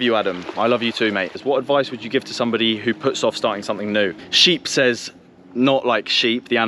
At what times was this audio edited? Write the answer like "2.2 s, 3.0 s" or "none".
1.4 s, 4.3 s